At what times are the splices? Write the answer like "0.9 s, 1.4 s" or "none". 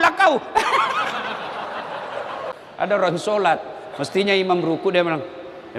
2.5 s